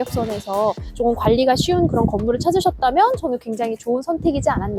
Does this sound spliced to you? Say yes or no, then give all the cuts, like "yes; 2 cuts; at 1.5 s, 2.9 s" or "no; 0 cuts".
no; 0 cuts